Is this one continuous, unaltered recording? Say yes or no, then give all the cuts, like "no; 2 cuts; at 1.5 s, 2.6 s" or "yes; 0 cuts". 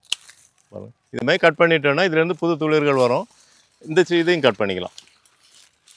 yes; 0 cuts